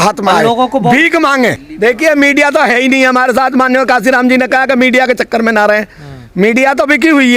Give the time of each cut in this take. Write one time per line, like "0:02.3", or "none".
0:01.6

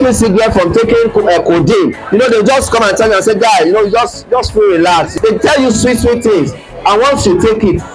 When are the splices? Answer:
0:02.0
0:05.1

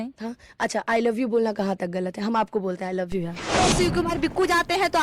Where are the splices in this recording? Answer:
0:03.5

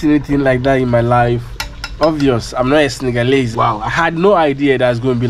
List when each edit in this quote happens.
0:03.5

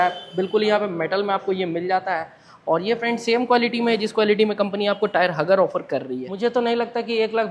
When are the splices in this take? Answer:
0:06.2

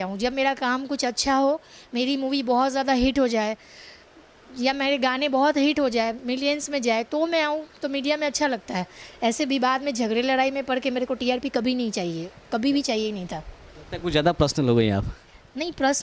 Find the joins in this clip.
none

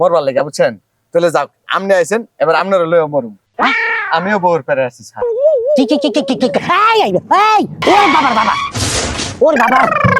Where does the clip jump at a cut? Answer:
0:07.8

